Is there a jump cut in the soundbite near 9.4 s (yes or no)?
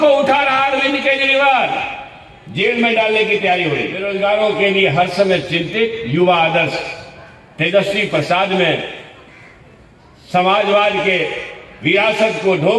no